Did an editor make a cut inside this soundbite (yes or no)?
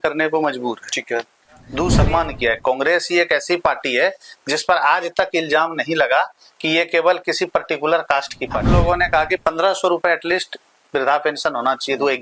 yes